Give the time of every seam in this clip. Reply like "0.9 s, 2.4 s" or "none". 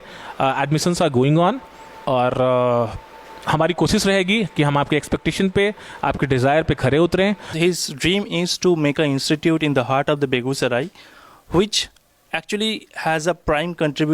7.5 s